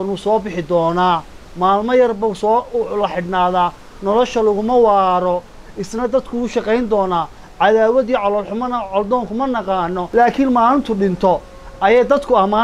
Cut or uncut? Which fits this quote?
cut